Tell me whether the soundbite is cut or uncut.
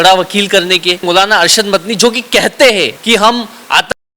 cut